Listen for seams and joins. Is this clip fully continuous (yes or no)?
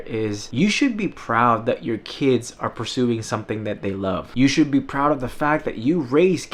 yes